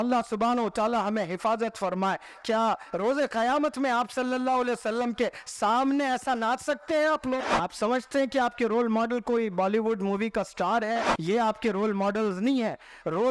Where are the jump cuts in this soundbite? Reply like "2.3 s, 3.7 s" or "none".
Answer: 7.5 s, 11.1 s

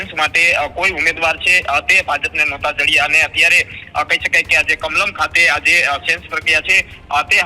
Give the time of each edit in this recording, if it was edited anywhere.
none

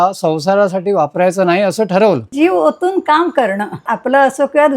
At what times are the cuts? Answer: 2.3 s, 3.8 s

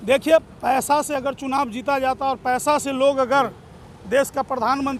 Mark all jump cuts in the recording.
none

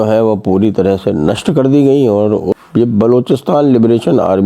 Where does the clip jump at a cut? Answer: 2.6 s

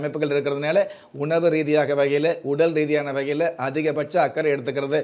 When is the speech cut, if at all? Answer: none

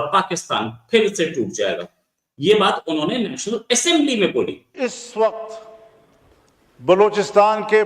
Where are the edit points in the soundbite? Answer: 4.6 s

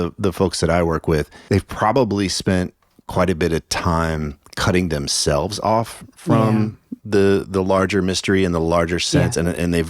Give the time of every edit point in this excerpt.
1.3 s

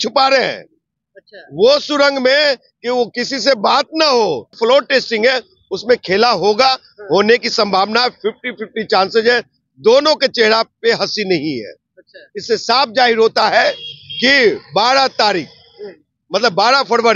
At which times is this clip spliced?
4.5 s

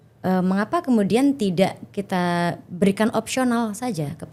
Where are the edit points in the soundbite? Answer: none

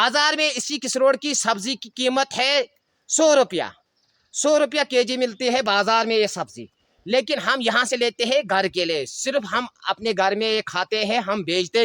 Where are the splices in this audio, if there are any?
none

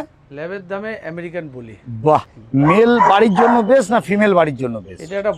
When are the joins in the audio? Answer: 2.3 s

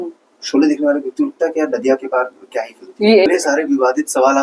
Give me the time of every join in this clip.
3.3 s

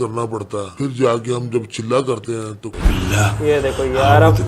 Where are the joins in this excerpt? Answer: 2.8 s

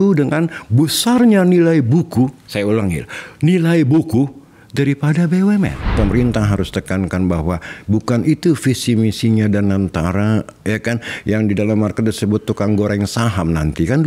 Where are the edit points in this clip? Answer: 5.9 s

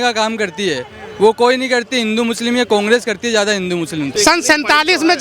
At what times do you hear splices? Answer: 4.1 s

